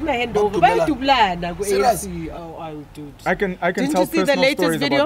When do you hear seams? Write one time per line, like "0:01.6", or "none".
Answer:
none